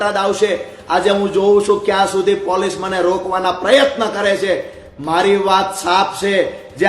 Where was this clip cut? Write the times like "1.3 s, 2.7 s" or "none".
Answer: none